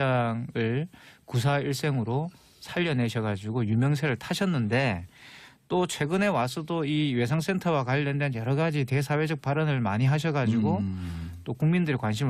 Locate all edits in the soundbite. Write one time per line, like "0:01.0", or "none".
0:08.5